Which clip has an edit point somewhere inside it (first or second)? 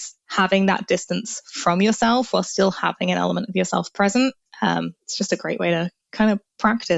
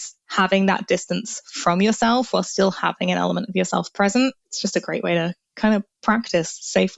second